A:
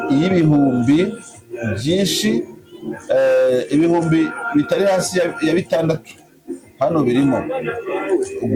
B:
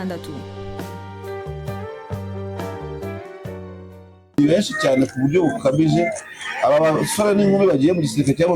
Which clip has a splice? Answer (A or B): B